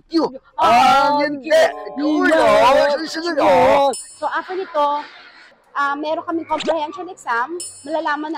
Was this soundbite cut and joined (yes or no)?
yes